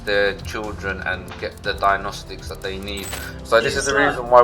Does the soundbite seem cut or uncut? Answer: cut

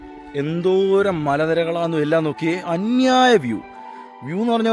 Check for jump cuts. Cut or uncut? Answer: uncut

